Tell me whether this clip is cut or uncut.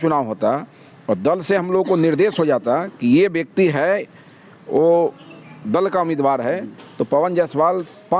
uncut